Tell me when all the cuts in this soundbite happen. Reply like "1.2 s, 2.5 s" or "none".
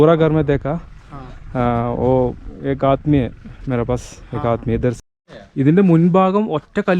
5.0 s